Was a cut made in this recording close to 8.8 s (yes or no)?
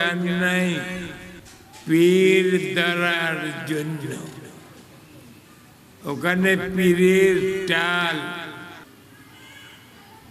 yes